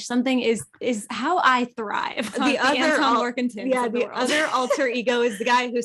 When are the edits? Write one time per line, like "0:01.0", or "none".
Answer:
0:02.3